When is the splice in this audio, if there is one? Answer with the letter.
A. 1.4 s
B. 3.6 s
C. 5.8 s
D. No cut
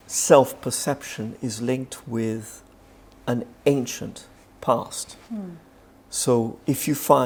D